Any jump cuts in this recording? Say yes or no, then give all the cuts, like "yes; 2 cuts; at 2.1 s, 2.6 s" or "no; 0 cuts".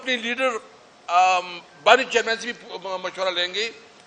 no; 0 cuts